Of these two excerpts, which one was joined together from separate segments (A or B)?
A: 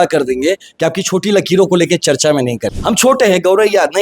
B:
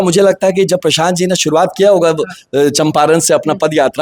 A